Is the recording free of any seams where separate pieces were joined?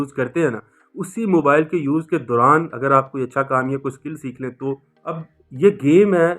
no; 1 cut; at 5.2 s

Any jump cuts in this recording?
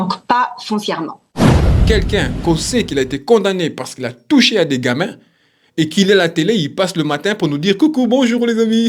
yes; 2 cuts; at 1.2 s, 1.9 s

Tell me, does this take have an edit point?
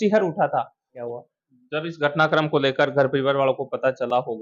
yes; 1 cut; at 0.9 s

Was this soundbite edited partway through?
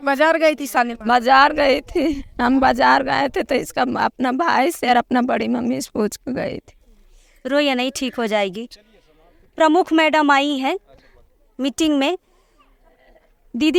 no; 0 cuts

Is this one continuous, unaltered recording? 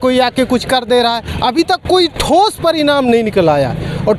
yes; 0 cuts

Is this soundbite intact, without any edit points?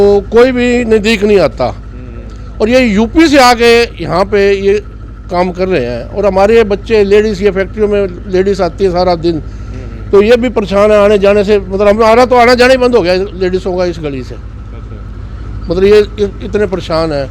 yes; 0 cuts

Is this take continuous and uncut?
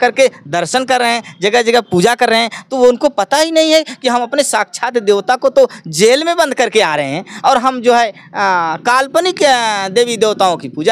yes; 0 cuts

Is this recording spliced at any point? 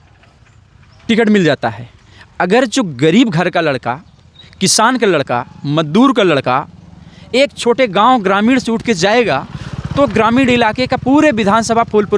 no; 0 cuts

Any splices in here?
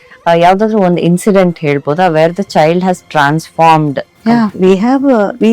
yes; 1 cut; at 4.1 s

